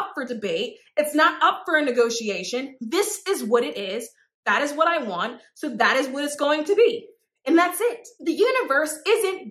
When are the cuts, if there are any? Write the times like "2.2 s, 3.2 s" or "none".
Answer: 8.1 s